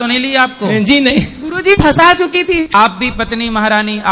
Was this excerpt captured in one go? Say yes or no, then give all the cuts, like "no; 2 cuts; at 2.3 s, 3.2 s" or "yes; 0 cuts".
no; 1 cut; at 2.7 s